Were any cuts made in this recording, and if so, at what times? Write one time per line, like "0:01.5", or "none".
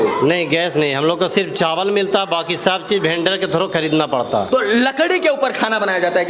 none